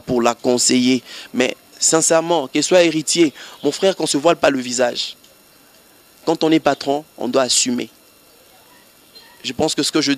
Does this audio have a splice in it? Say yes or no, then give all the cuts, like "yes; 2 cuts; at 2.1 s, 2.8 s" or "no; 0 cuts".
no; 0 cuts